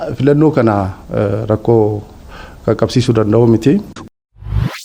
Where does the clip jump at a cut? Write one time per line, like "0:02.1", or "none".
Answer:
0:03.9